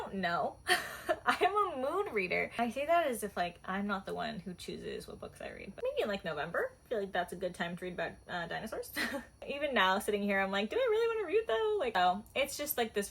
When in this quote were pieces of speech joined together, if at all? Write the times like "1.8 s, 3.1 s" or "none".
2.5 s, 5.7 s, 9.5 s, 12.0 s